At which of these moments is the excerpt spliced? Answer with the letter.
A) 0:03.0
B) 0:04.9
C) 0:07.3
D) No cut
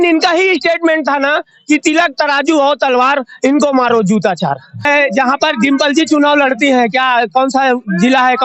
B